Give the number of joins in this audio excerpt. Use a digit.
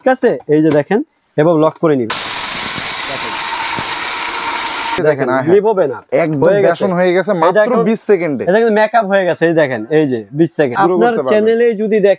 3